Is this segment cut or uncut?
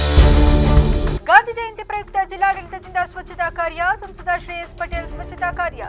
uncut